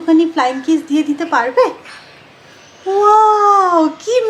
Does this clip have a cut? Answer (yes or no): no